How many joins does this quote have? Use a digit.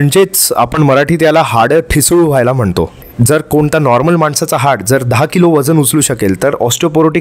1